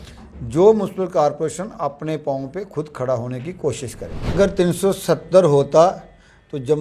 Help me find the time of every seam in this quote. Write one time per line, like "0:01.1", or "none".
0:04.3